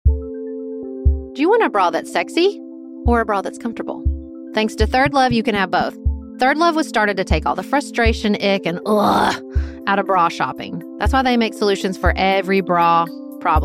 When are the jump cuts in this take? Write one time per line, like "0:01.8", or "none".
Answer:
0:01.2